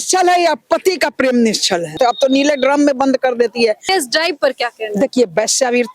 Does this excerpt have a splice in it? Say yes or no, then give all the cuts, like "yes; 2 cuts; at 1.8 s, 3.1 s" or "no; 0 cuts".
yes; 2 cuts; at 1.9 s, 3.8 s